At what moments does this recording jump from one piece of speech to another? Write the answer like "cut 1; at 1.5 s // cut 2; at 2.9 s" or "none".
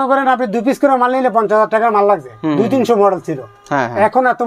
none